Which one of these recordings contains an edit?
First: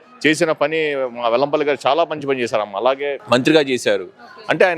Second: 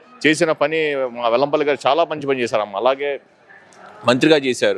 first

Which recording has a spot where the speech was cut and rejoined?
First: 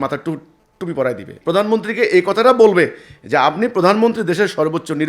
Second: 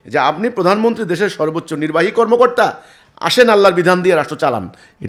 first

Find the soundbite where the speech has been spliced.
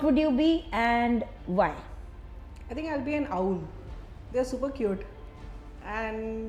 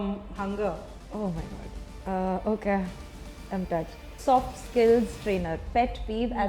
second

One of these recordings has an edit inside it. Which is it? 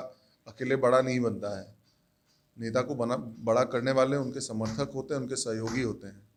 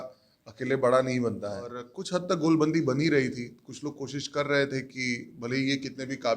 second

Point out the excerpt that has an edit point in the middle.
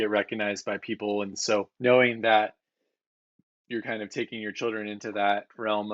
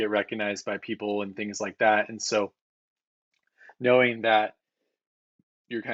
first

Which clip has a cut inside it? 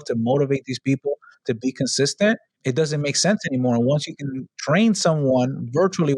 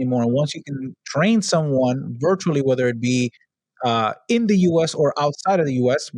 first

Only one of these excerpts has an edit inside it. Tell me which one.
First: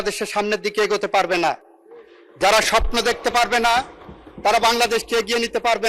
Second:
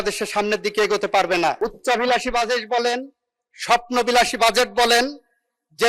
second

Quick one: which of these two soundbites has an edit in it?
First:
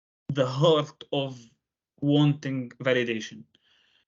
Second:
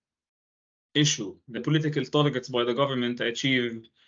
second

